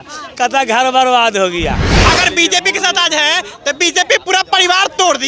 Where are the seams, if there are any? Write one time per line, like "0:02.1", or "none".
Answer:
0:01.9

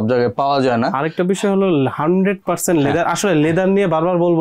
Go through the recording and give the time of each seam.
none

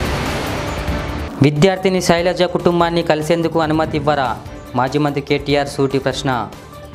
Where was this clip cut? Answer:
0:01.2

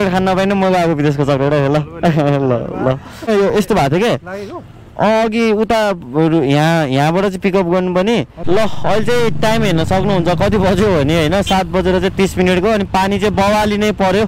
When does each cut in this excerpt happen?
0:03.3
0:08.3

